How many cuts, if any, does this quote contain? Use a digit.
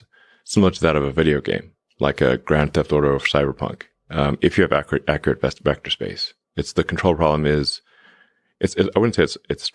0